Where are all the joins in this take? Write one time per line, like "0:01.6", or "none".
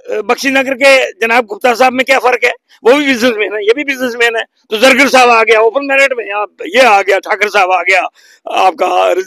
none